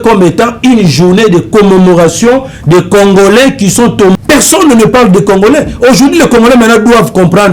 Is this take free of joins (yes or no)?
no